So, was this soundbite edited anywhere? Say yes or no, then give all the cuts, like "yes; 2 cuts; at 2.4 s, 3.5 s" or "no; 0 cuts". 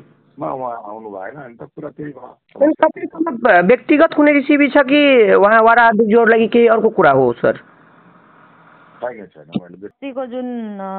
yes; 1 cut; at 9.9 s